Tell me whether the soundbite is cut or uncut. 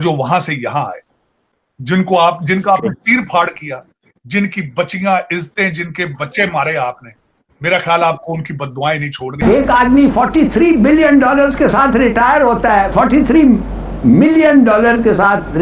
cut